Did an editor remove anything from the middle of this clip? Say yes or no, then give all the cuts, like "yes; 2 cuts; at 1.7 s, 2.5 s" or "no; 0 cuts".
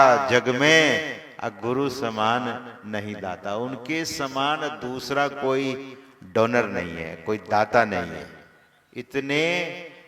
no; 0 cuts